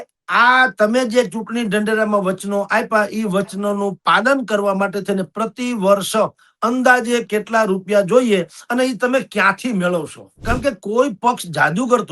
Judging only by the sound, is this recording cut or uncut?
cut